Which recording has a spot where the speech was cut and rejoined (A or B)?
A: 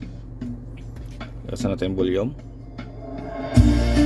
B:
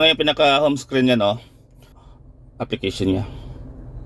B